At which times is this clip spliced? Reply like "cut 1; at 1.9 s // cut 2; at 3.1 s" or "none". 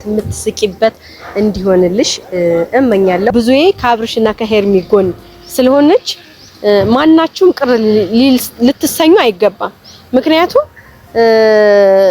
cut 1; at 3.3 s